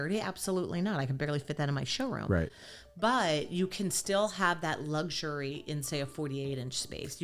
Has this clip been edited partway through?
no; 0 cuts

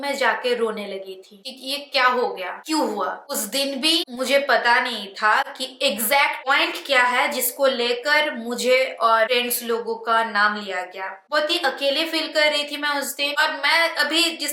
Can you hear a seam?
no; 0 cuts

